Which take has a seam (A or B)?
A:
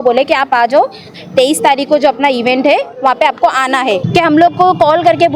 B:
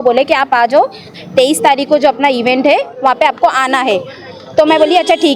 A